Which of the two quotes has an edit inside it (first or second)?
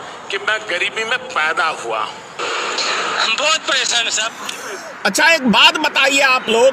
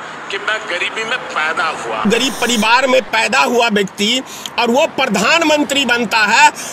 second